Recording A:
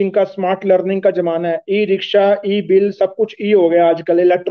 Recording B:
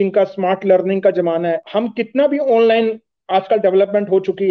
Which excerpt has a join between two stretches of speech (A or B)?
B